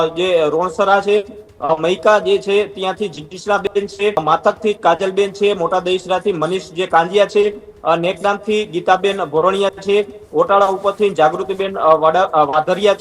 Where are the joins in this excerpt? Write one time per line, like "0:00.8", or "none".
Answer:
none